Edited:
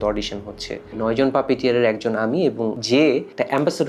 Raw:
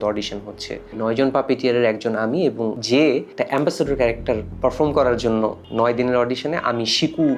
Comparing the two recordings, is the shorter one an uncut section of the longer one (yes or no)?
yes